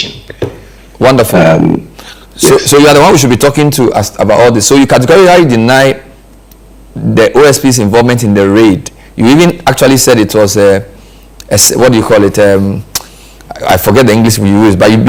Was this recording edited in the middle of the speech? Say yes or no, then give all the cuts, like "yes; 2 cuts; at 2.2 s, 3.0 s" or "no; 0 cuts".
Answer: no; 0 cuts